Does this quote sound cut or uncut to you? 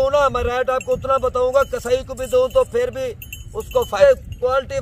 cut